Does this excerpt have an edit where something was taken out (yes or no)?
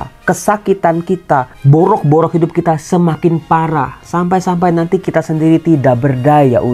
yes